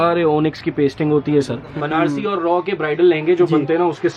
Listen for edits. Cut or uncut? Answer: cut